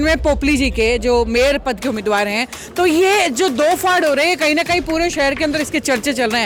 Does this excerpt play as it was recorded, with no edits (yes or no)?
yes